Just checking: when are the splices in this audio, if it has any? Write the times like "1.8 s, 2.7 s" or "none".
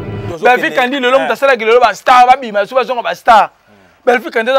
none